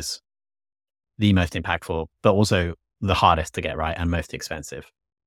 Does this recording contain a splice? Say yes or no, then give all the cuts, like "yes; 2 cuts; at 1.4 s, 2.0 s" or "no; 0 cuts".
yes; 1 cut; at 2.1 s